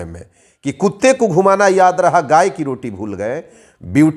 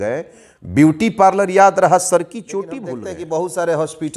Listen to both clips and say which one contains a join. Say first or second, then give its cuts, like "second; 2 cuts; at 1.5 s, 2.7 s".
second; 1 cut; at 3.1 s